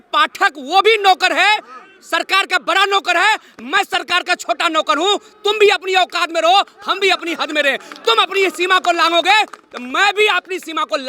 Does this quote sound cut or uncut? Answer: uncut